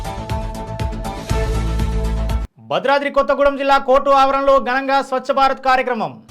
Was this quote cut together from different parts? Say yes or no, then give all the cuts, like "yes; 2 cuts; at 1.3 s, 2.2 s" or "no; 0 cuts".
yes; 1 cut; at 2.4 s